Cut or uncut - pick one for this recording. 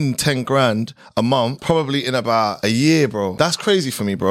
cut